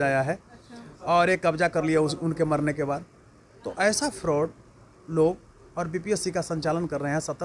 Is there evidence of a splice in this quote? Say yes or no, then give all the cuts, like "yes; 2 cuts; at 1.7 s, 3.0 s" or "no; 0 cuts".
no; 0 cuts